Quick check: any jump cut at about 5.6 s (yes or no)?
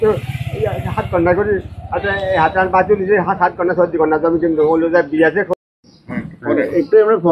yes